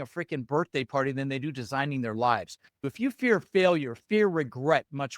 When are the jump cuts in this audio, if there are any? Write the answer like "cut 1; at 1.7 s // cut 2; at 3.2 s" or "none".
cut 1; at 2.9 s

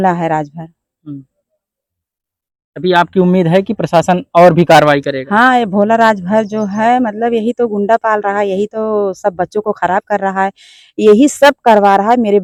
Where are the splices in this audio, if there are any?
none

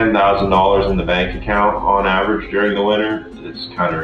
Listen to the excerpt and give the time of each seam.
none

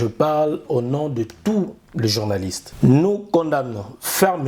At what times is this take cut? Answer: cut 1; at 2.6 s

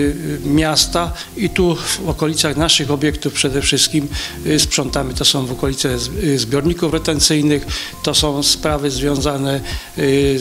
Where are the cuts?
none

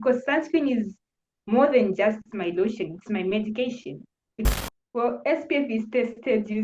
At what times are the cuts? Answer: cut 1; at 4.5 s

